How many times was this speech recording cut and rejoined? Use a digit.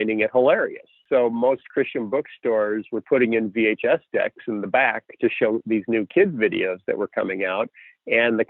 1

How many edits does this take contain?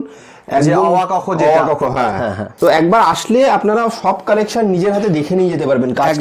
1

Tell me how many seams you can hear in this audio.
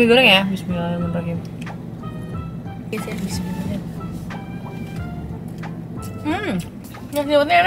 1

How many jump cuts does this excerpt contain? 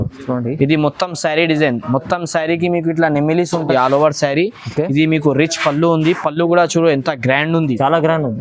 1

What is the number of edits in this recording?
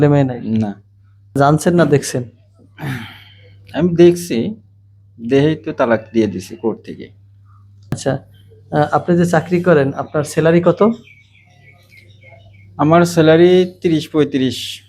2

